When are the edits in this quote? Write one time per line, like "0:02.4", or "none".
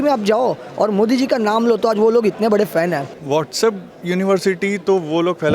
0:03.1